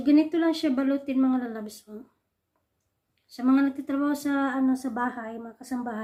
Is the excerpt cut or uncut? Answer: uncut